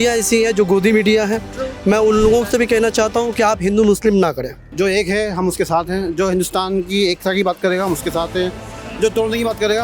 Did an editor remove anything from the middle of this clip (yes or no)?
yes